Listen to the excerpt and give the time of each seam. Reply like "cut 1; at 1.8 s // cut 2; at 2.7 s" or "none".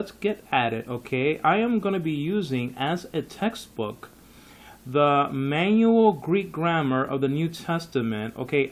none